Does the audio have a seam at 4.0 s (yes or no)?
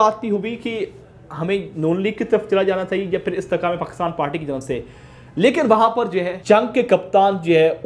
no